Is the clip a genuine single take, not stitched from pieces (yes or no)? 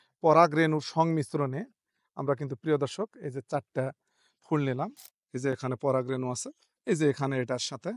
no